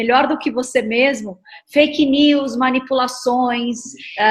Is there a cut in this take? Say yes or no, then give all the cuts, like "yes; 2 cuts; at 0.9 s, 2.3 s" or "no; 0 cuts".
no; 0 cuts